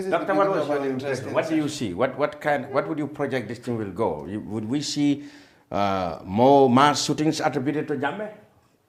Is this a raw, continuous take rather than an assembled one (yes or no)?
yes